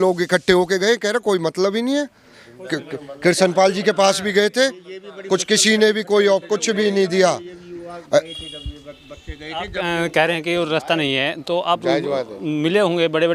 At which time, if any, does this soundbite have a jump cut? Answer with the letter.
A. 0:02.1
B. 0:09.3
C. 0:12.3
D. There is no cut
D